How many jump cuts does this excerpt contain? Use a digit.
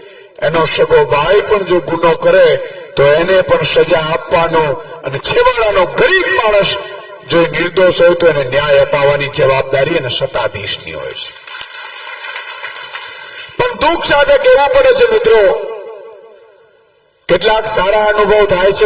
0